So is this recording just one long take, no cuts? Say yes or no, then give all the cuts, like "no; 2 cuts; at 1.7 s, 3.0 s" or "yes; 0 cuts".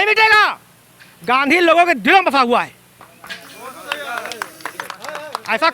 yes; 0 cuts